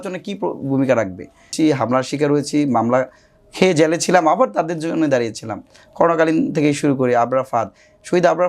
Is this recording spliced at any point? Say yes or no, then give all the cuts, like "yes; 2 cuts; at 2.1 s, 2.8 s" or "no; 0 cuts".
yes; 1 cut; at 1.5 s